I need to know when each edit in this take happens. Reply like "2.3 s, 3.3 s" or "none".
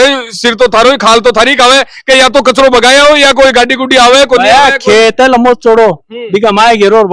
none

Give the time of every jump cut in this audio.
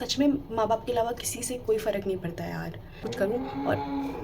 3.1 s

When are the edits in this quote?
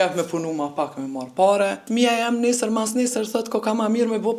1.8 s

